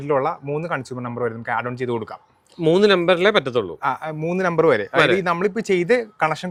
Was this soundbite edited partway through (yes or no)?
no